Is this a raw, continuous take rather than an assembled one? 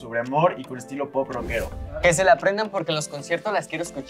no; 1 cut; at 1.8 s

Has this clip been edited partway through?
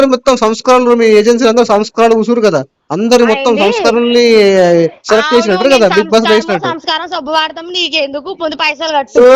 no; 0 cuts

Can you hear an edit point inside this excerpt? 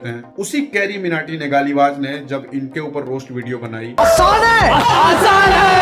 no; 0 cuts

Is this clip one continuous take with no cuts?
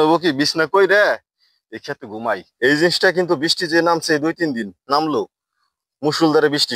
no; 1 cut; at 2.5 s

